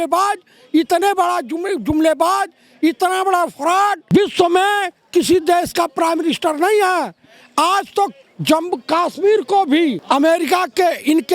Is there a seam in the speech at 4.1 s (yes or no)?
yes